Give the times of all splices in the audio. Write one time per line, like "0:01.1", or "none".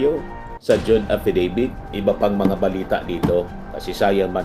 0:01.8